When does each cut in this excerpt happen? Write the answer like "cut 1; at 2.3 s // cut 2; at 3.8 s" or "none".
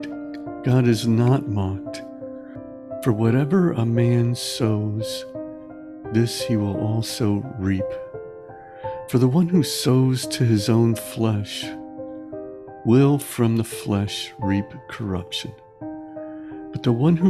none